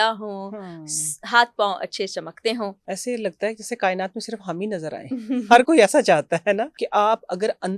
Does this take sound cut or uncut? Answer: cut